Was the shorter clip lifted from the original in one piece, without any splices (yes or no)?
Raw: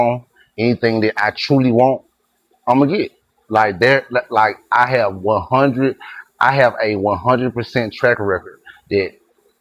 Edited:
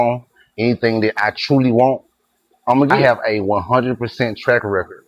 no